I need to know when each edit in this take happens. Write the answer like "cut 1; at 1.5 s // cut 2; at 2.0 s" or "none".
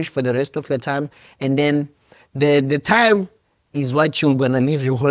none